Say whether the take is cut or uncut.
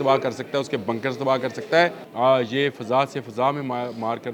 cut